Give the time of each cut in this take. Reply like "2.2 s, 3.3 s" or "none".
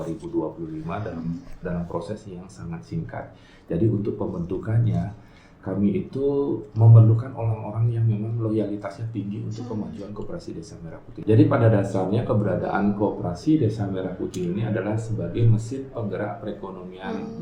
11.1 s